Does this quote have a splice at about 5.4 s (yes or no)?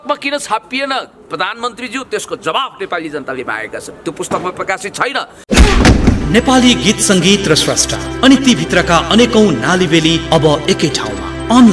yes